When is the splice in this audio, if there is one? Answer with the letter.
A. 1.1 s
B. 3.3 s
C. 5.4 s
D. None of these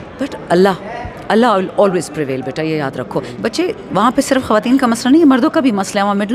B